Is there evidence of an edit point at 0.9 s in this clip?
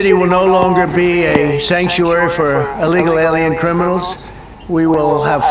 yes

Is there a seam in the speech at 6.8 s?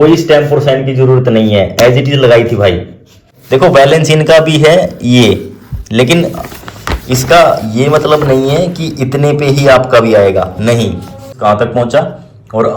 no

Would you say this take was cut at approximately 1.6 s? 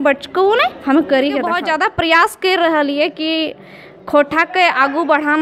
yes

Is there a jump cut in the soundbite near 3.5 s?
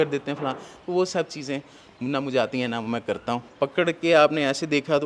yes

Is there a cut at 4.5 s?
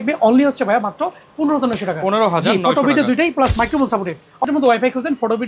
yes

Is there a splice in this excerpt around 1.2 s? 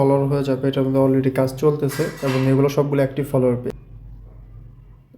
no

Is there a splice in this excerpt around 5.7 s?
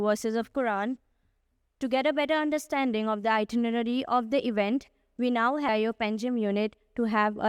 yes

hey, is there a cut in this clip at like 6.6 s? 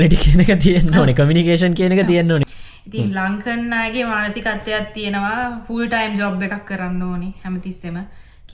no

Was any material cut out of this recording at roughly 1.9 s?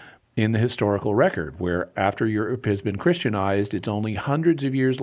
yes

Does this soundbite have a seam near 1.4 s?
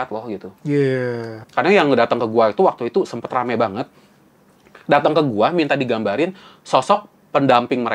yes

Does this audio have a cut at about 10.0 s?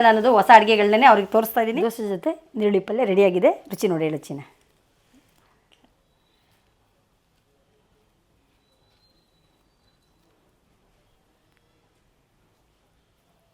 no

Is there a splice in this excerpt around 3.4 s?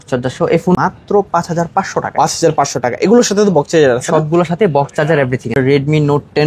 no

